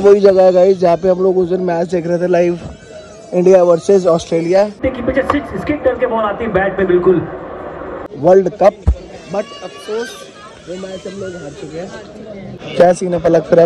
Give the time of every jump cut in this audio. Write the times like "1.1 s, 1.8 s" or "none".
none